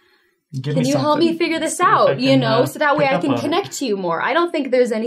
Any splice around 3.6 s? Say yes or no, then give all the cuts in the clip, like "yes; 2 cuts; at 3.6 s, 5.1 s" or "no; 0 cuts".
no; 1 cut; at 2.2 s